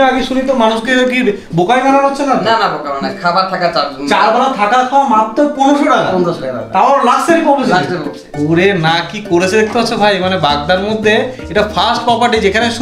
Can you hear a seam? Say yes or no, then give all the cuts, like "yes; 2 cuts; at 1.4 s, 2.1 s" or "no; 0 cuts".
no; 0 cuts